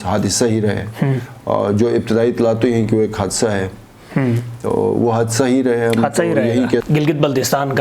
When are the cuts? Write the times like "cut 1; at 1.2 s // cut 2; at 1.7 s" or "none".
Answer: cut 1; at 6.8 s